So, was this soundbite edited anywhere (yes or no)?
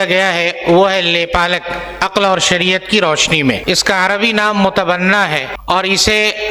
yes